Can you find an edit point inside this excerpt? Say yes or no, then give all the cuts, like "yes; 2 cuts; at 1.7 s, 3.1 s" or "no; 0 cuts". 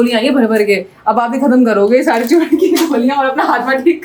no; 0 cuts